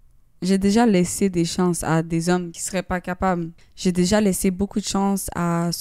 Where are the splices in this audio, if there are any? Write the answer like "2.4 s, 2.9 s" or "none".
2.6 s, 3.6 s